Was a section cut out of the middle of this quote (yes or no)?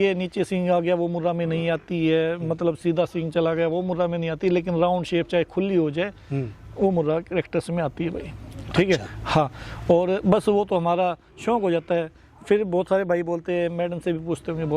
no